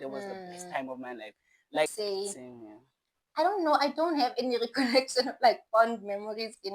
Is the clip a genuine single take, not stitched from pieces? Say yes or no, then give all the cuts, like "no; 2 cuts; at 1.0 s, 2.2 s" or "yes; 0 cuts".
no; 1 cut; at 1.9 s